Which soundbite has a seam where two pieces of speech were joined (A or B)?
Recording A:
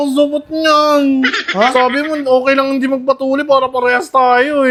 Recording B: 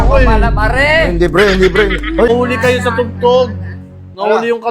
B